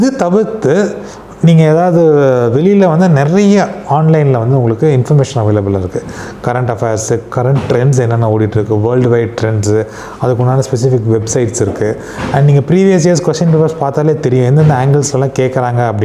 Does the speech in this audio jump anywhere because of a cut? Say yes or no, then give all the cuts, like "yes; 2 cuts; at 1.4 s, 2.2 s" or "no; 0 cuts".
no; 0 cuts